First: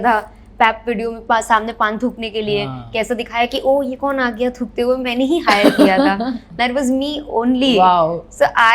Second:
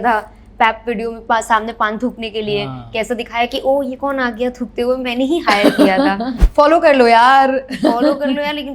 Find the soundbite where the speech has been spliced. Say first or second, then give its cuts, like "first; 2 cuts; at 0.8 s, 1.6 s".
second; 1 cut; at 6.4 s